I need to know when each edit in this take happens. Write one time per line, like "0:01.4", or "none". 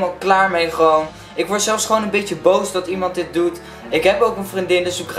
none